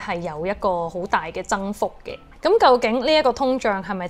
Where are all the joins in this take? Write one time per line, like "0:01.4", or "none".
0:02.3

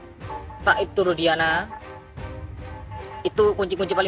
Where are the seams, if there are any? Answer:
none

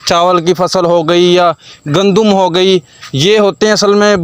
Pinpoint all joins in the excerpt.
none

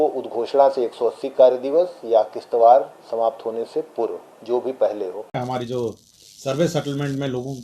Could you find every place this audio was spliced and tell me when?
0:05.4

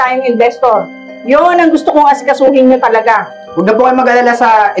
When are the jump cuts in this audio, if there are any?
0:03.4

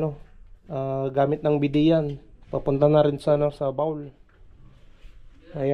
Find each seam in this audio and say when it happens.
none

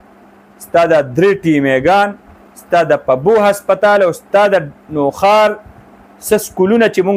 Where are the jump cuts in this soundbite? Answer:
none

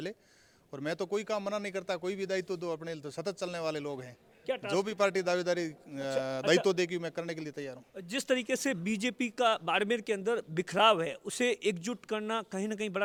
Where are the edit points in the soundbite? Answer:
none

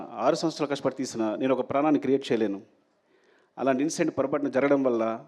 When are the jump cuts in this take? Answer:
none

